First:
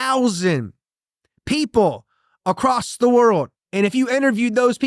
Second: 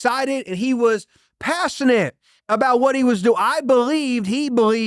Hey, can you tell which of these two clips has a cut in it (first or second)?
first